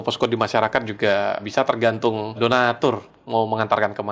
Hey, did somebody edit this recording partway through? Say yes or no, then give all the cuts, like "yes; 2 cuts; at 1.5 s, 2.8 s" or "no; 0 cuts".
yes; 2 cuts; at 1.4 s, 2.4 s